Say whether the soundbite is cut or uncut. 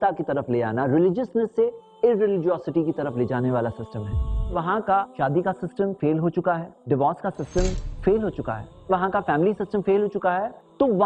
cut